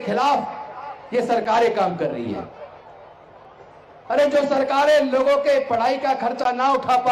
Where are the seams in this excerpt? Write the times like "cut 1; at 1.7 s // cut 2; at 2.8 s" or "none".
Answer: none